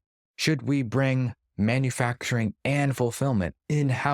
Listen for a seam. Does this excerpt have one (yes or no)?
no